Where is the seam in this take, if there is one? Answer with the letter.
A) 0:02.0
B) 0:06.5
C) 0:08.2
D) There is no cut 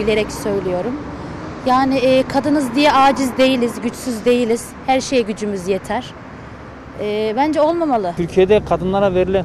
C